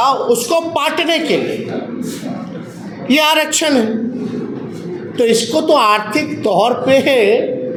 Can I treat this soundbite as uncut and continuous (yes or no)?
yes